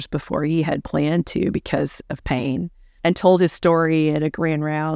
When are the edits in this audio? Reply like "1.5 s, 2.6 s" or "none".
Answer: 2.8 s